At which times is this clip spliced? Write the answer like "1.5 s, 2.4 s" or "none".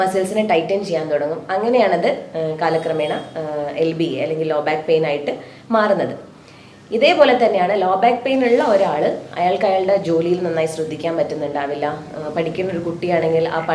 none